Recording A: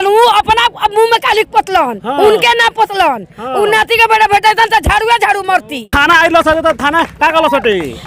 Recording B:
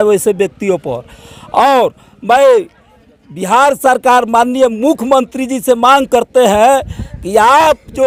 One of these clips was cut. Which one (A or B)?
A